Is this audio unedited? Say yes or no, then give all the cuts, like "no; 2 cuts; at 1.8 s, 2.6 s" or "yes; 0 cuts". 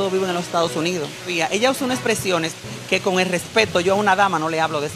no; 1 cut; at 1.3 s